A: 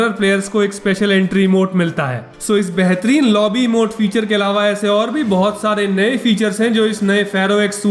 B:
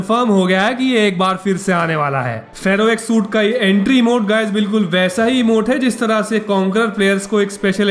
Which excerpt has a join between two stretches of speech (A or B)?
B